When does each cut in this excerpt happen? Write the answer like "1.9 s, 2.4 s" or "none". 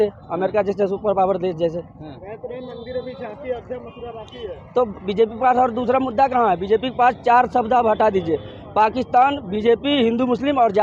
none